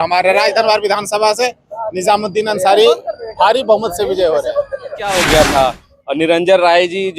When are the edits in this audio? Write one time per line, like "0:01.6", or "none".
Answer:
0:05.0

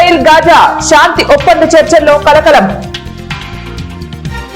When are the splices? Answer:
0:02.9

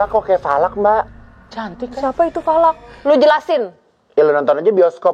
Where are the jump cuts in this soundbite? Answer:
0:01.1

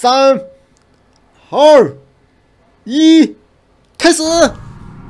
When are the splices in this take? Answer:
none

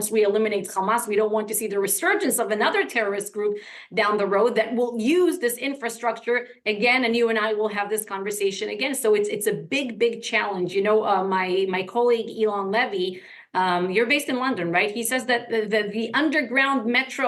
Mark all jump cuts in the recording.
none

